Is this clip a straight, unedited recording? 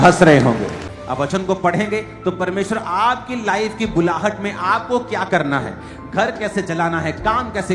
no; 1 cut; at 0.9 s

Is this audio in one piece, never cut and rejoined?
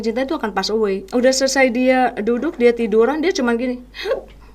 no; 1 cut; at 1.1 s

